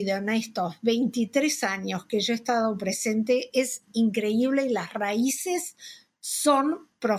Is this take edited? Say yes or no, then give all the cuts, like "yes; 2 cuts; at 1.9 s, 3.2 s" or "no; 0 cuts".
no; 0 cuts